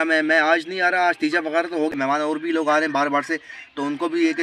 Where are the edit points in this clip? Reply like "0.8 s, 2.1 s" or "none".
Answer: 1.9 s

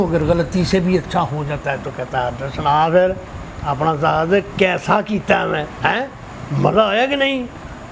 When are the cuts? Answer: none

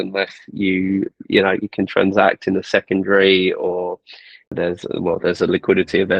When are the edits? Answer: 4.5 s

